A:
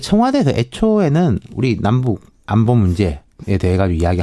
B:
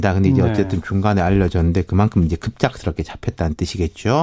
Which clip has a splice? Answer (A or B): A